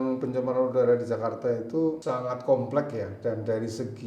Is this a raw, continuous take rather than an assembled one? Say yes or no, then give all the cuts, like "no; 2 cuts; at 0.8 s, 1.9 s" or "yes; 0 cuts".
no; 1 cut; at 2.0 s